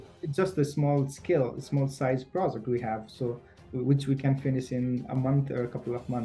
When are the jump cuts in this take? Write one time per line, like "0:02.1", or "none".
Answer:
none